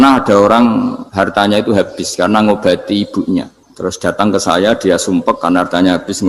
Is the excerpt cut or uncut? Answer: cut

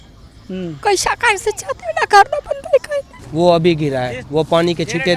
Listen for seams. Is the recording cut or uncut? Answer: cut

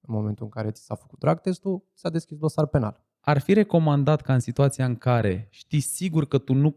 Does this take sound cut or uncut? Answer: cut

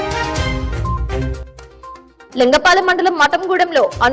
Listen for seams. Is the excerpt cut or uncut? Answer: uncut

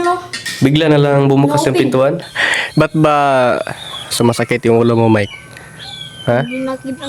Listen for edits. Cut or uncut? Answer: cut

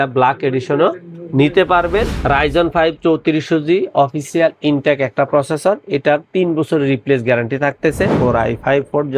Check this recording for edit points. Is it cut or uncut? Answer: cut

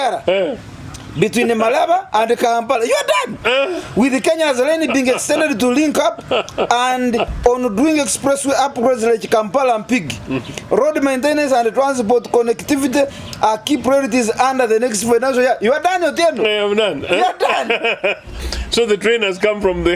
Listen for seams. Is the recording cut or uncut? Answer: uncut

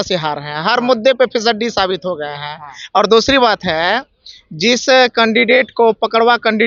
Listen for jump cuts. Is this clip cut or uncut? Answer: uncut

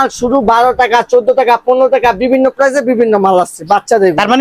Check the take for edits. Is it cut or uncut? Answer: uncut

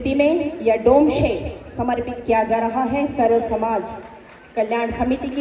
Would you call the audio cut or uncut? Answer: uncut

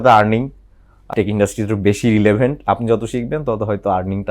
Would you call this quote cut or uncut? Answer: cut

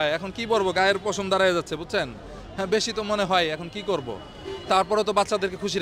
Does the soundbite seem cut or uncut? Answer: uncut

